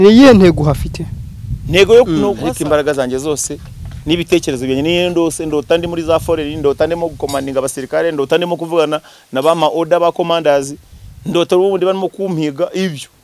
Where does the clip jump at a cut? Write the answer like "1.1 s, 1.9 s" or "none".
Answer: 2.4 s